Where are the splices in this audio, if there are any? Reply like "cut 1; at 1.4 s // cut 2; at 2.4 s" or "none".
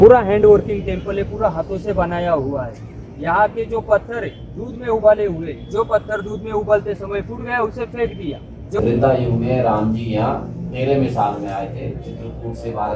cut 1; at 8.8 s